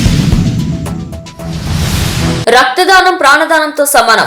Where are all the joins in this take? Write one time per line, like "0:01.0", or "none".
0:02.4